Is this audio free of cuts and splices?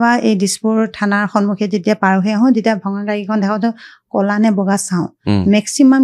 yes; 0 cuts

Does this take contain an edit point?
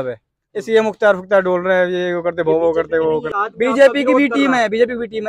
yes; 1 cut; at 3.4 s

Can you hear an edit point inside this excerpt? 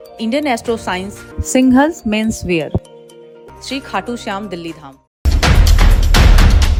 no; 0 cuts

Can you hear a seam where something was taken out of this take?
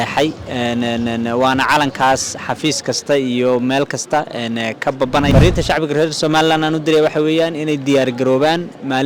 yes; 1 cut; at 5.3 s

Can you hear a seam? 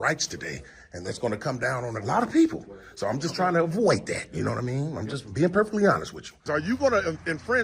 yes; 1 cut; at 6.5 s

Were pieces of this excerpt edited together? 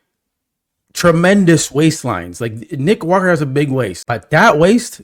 yes; 1 cut; at 4.0 s

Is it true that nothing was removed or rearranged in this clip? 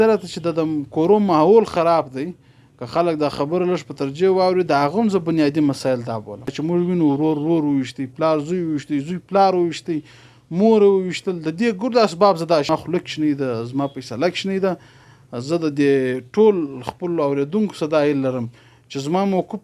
no; 2 cuts; at 6.5 s, 12.7 s

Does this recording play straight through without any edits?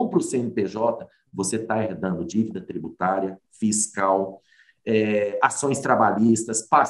yes; 0 cuts

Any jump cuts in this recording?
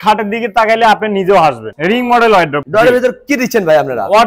yes; 2 cuts; at 1.7 s, 2.6 s

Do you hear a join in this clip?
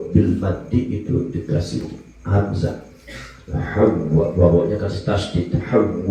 no; 0 cuts

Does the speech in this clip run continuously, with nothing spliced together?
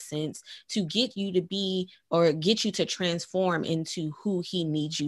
yes; 0 cuts

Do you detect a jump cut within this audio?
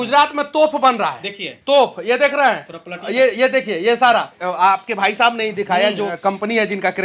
yes; 2 cuts; at 4.3 s, 6.1 s

